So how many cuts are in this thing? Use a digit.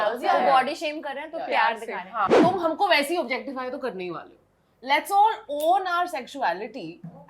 1